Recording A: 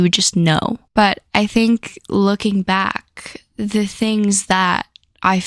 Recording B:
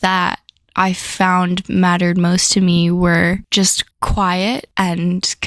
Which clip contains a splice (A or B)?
B